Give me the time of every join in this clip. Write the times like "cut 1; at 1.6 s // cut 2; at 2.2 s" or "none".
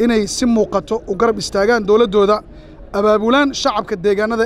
none